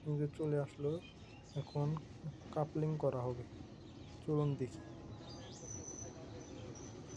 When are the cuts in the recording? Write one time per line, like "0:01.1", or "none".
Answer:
none